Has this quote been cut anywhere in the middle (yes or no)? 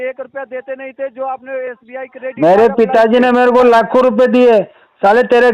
no